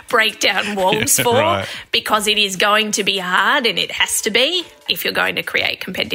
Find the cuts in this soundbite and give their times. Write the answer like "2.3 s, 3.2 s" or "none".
4.8 s